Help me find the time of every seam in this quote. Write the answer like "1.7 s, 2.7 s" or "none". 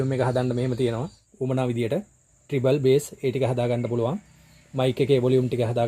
1.2 s